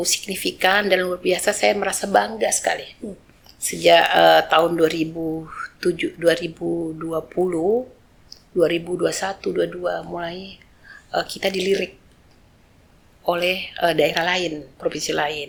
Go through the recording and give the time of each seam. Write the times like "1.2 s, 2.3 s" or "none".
none